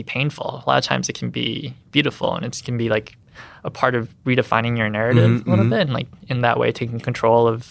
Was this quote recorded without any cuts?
yes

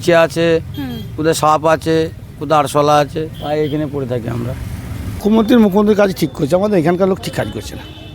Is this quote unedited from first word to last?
no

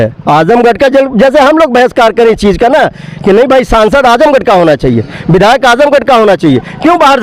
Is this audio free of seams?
yes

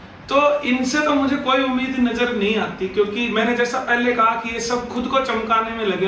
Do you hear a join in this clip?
no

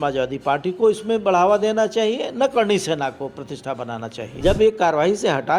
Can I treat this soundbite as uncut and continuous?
no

